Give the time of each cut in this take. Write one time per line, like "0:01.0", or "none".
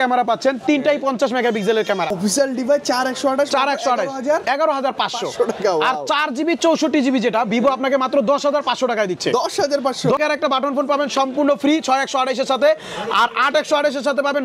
0:02.2
0:10.2